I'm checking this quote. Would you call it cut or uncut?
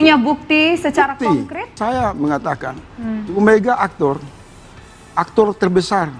cut